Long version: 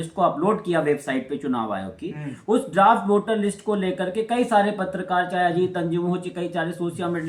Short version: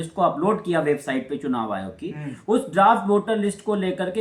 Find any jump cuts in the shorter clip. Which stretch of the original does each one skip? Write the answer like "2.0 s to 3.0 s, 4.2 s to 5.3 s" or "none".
none